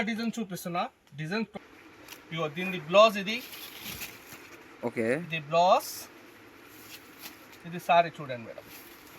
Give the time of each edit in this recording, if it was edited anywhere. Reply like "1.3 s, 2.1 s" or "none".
1.5 s